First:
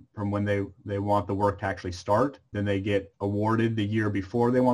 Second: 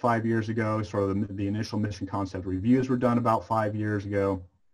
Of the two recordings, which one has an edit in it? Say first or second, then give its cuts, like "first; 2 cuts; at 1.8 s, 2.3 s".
first; 1 cut; at 2.5 s